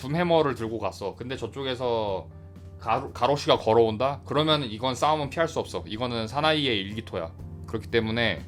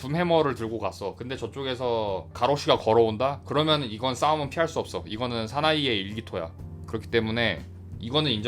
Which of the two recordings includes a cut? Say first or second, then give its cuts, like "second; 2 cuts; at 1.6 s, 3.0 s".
second; 1 cut; at 2.3 s